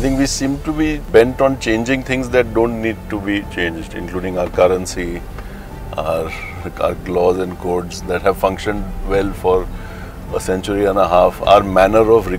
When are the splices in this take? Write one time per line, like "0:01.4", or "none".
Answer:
0:01.0